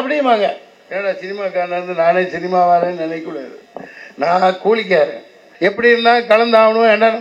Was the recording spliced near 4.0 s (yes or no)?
no